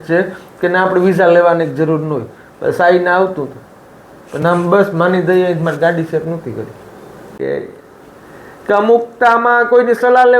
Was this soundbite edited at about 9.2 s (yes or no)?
no